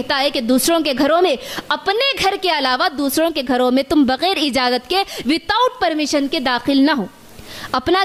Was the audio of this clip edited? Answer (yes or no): no